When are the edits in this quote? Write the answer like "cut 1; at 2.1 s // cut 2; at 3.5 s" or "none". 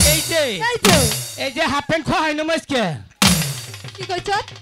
none

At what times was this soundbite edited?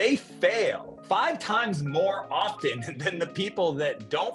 cut 1; at 0.9 s

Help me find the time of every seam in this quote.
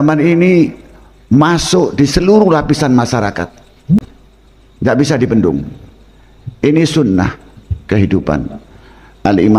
cut 1; at 4.0 s

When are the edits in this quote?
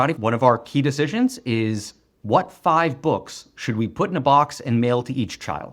none

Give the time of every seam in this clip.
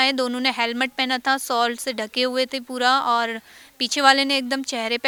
none

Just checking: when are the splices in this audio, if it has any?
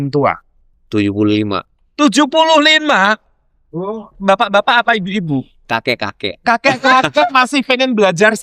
none

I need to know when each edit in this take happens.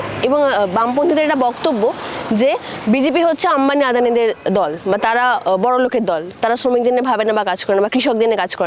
none

